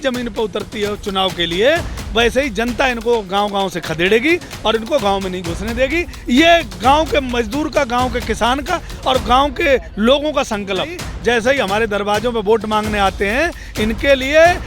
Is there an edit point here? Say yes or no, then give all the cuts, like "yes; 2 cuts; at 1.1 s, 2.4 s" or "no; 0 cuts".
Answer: yes; 1 cut; at 11.0 s